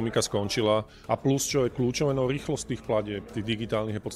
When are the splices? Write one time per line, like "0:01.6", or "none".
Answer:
0:01.0

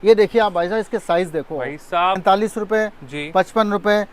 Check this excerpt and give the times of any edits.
0:02.2

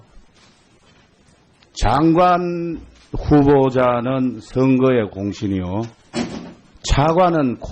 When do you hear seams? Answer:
0:01.3

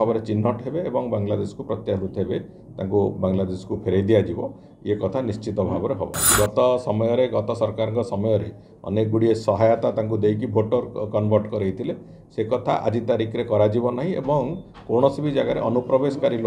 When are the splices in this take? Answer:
0:06.3

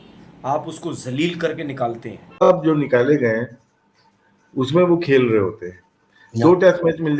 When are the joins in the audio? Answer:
0:02.5

